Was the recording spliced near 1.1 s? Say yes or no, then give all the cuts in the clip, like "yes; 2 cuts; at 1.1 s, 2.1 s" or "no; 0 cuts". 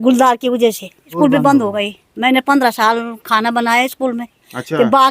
yes; 1 cut; at 1.1 s